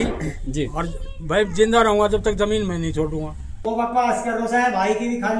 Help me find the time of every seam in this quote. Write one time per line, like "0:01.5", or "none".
0:03.6